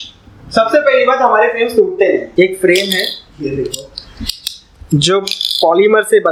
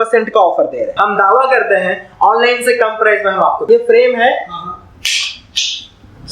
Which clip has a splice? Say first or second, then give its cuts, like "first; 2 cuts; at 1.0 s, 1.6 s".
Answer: second; 2 cuts; at 0.9 s, 3.6 s